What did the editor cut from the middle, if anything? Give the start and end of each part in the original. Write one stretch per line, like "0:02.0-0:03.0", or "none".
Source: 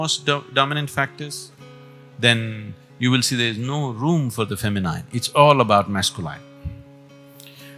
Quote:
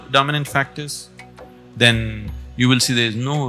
none